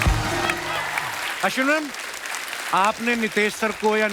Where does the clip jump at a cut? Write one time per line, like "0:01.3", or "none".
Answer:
0:01.1